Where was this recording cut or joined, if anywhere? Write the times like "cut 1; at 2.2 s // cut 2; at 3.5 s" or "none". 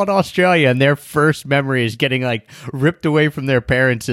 cut 1; at 2.5 s